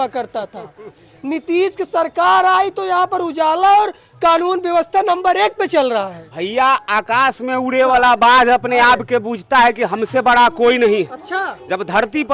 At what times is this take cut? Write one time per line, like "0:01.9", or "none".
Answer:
none